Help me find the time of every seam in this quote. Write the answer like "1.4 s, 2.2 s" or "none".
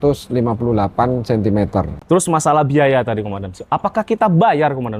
1.9 s

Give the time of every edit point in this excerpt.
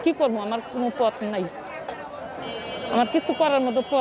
none

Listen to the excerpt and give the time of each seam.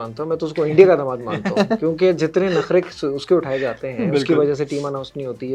none

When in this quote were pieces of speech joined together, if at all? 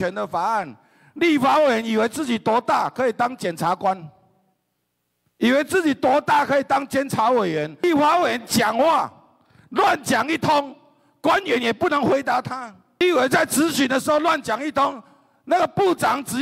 7.8 s, 13.0 s

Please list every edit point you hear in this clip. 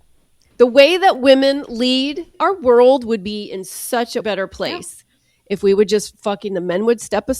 2.3 s, 4.2 s

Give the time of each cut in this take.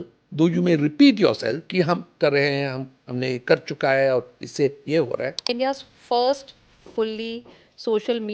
2.1 s, 5.4 s

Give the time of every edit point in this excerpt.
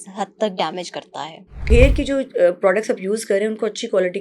1.7 s

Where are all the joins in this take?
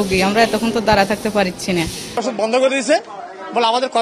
none

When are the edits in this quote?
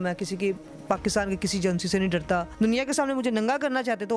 2.5 s

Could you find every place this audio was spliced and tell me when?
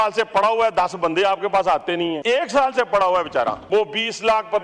2.2 s, 3.6 s

